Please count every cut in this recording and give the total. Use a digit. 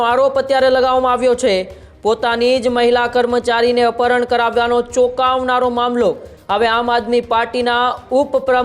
0